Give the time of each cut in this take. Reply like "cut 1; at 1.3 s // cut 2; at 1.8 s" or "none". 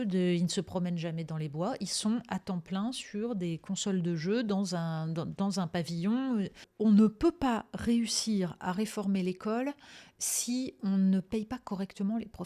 cut 1; at 6.6 s